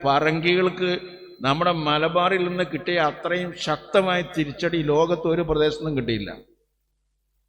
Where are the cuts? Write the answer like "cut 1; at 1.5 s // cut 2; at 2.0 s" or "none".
none